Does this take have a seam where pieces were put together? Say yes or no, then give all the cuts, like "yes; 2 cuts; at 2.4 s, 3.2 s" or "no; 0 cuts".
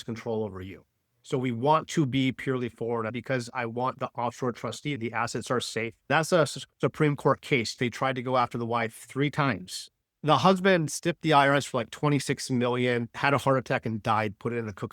yes; 4 cuts; at 3.1 s, 5.0 s, 6.1 s, 7.8 s